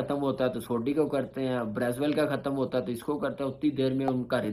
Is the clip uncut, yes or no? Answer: yes